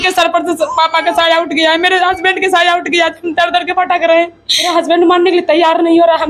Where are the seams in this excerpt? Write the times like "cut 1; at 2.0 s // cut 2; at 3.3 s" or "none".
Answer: cut 1; at 4.7 s